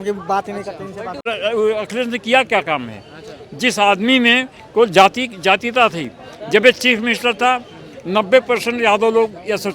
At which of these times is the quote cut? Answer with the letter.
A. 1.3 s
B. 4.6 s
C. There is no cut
A